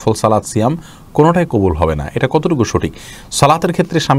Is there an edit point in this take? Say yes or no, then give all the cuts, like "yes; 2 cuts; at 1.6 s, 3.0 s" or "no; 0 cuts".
no; 0 cuts